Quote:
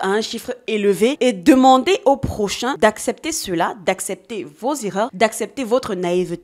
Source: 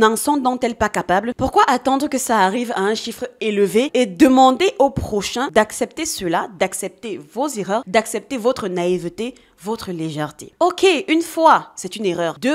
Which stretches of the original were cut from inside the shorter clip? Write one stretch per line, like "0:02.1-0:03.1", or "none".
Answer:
none